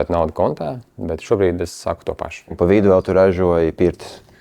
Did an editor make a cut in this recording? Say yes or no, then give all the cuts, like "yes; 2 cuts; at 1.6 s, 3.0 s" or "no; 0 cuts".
yes; 1 cut; at 2.5 s